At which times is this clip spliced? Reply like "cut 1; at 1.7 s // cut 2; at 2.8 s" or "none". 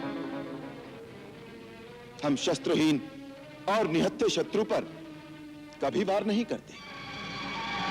none